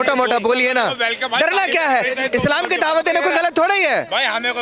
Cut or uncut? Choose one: uncut